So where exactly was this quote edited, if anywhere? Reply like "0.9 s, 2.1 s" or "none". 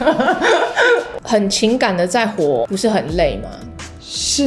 1.1 s, 2.7 s